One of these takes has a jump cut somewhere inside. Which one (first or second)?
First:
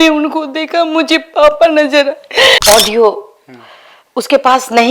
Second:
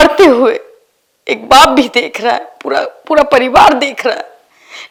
first